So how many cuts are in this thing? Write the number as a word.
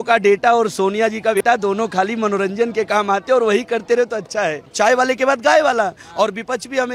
two